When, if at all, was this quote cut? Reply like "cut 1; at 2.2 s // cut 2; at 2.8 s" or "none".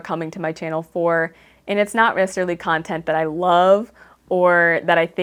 none

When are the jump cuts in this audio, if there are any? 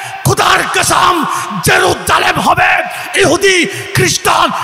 none

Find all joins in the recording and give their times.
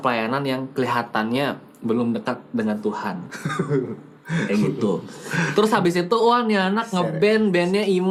none

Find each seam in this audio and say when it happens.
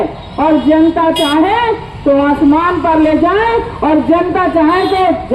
none

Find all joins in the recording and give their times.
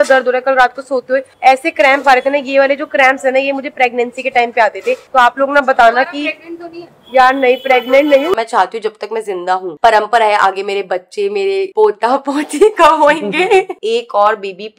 cut 1; at 8.4 s // cut 2; at 9.7 s // cut 3; at 13.8 s

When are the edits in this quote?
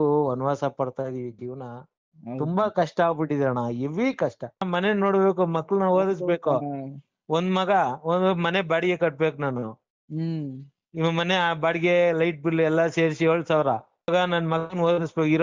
cut 1; at 4.7 s // cut 2; at 14.1 s

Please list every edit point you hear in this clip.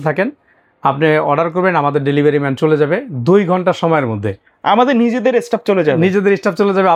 none

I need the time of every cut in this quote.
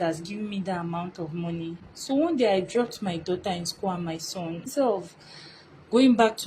cut 1; at 1.9 s // cut 2; at 4.7 s

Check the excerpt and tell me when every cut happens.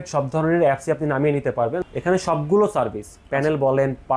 cut 1; at 1.8 s

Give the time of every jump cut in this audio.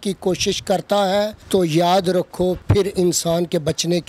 cut 1; at 1.4 s // cut 2; at 2.6 s

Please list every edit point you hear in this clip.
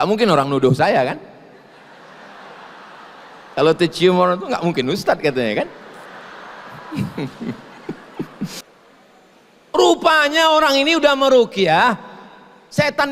cut 1; at 8.7 s

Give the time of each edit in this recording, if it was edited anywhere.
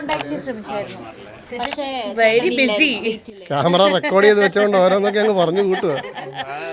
none

